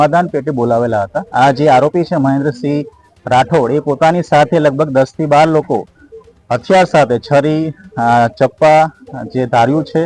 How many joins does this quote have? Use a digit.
1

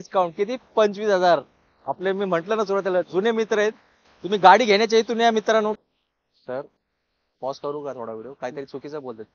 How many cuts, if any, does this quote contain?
1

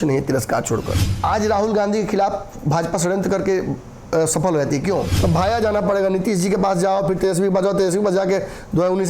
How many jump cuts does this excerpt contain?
2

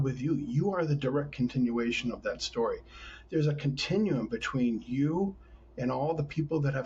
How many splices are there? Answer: 0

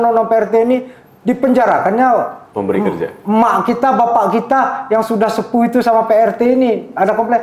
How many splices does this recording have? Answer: 1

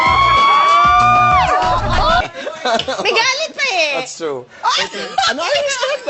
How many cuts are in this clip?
1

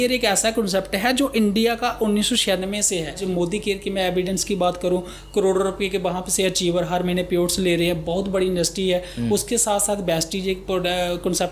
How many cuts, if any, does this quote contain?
1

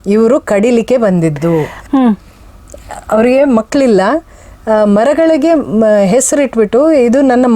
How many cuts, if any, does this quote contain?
1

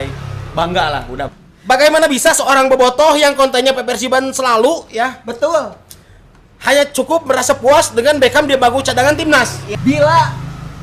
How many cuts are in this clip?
2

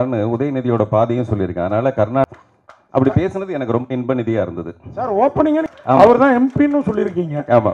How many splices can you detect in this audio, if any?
2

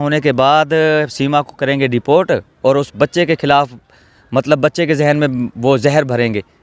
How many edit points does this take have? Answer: 0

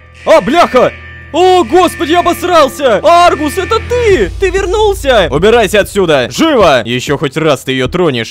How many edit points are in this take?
2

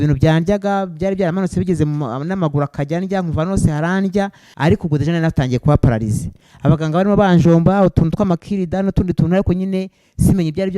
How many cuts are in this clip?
1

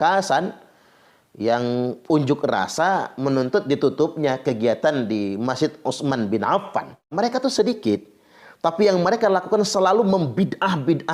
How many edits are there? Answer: 1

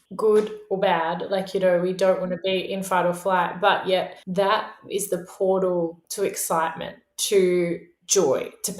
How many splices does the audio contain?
1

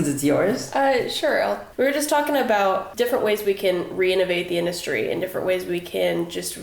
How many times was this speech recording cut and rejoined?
2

